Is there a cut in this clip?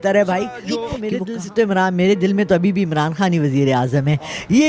yes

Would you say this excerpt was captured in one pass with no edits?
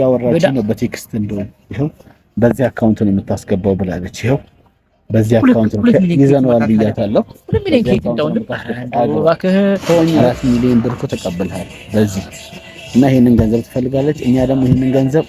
no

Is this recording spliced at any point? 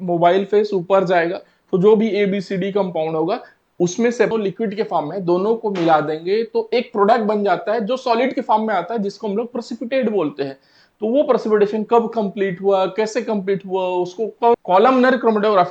yes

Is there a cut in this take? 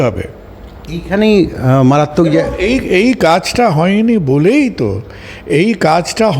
no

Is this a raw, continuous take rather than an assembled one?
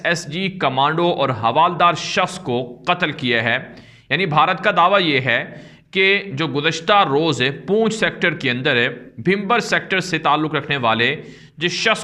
yes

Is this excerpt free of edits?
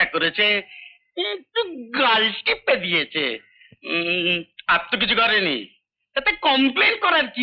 yes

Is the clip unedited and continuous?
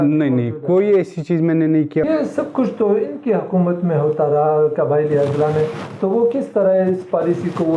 no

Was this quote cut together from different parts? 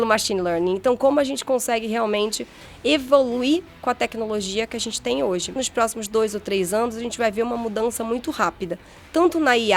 yes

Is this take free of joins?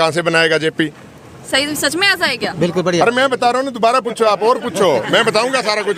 yes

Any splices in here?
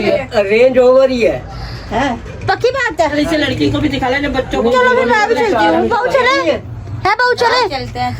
no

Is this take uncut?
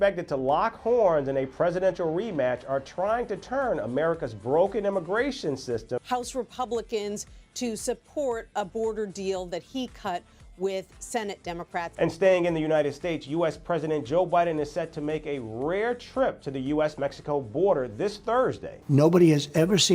no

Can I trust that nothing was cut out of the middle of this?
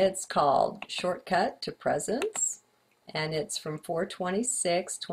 yes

